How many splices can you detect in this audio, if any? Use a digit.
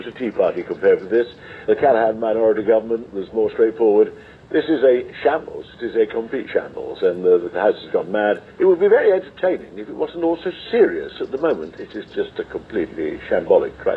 3